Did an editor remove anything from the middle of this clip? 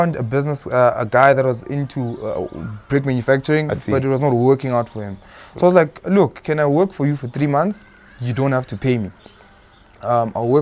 no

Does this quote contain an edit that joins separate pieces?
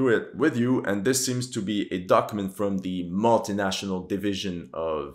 no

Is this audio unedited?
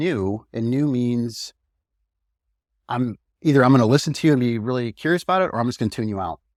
yes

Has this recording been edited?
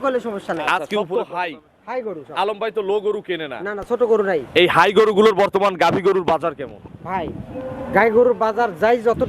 yes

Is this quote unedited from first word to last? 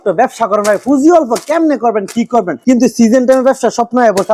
yes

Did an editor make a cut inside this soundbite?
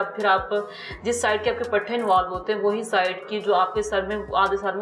no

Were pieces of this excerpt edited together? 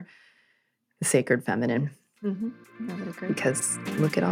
no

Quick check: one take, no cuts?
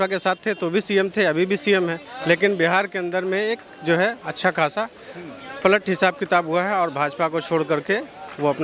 yes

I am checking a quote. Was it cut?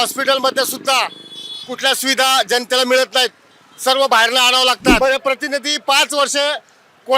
yes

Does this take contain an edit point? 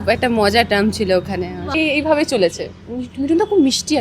yes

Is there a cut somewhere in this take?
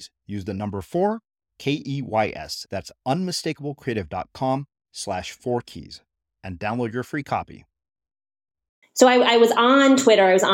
yes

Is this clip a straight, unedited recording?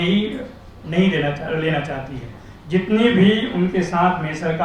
yes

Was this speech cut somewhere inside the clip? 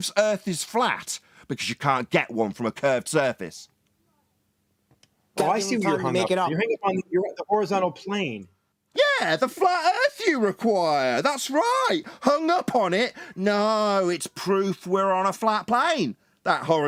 no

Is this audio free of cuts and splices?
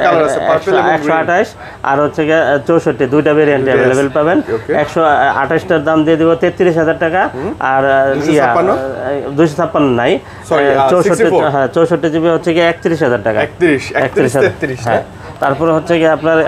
yes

